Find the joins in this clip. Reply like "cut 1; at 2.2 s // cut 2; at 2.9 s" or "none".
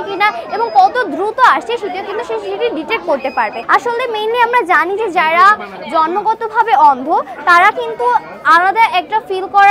cut 1; at 3.6 s